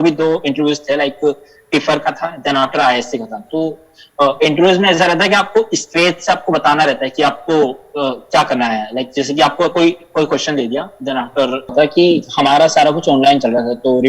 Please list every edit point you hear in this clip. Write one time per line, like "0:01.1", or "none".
0:11.7